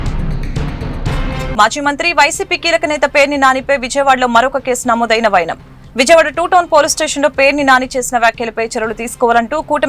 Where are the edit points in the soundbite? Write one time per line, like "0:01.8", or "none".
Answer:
0:01.5